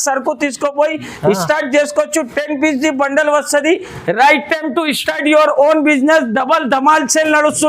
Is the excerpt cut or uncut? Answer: cut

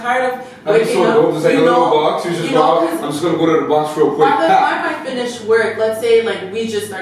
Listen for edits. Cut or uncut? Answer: uncut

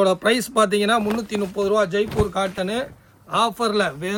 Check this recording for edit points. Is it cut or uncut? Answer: uncut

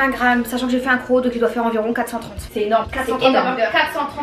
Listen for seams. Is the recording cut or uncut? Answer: uncut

